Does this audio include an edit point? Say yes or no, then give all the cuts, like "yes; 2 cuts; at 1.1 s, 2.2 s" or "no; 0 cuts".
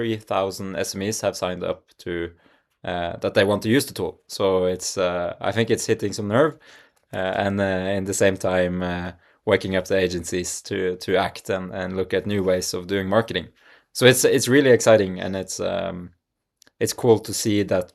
no; 0 cuts